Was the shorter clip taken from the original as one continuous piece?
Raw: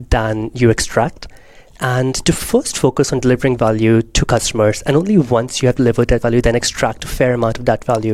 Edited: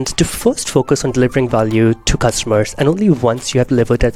yes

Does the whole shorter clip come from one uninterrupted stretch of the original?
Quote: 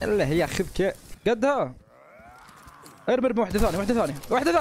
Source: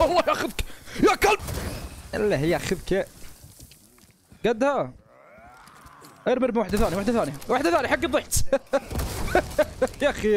no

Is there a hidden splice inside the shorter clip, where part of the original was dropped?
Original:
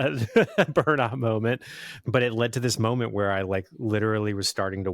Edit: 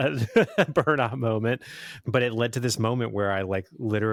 no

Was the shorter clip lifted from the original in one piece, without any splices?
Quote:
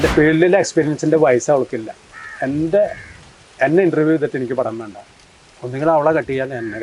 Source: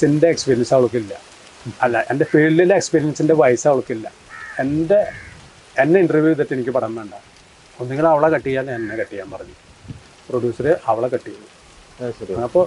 yes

